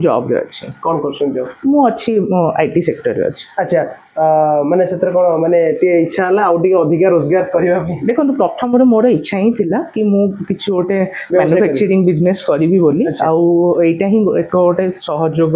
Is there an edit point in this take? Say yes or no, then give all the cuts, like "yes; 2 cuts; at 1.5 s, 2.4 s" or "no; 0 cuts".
no; 0 cuts